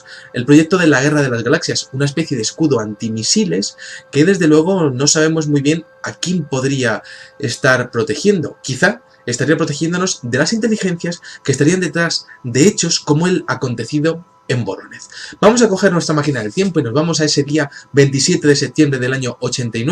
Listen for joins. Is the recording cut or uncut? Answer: uncut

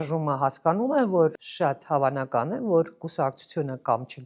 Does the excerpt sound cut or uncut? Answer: cut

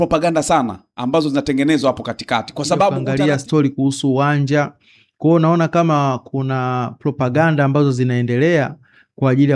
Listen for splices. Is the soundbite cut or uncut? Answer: cut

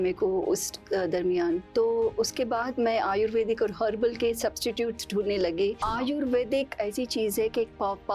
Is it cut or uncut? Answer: cut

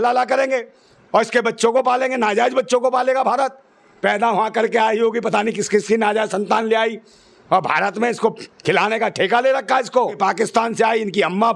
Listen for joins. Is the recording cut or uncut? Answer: cut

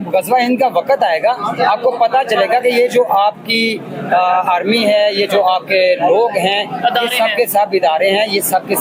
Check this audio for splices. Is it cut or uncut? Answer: uncut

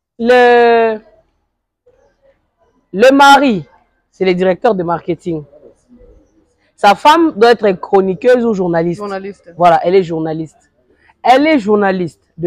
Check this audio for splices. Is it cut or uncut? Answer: uncut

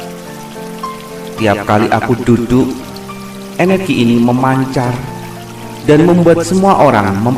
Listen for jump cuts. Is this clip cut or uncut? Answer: cut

